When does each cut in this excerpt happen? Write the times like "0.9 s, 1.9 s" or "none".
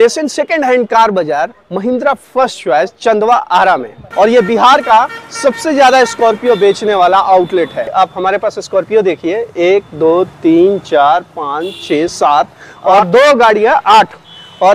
7.8 s